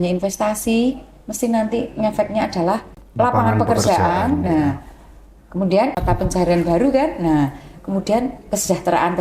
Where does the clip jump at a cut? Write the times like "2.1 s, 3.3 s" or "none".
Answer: 3.0 s, 6.0 s